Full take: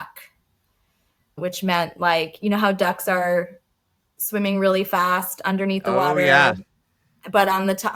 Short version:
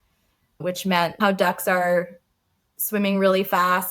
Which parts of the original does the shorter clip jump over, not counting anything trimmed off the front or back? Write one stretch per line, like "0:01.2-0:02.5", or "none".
0:02.0-0:02.6